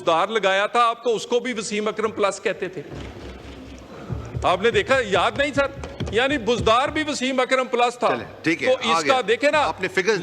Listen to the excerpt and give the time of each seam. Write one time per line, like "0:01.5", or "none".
none